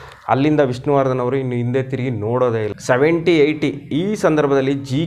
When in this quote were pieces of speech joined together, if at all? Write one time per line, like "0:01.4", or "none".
0:02.7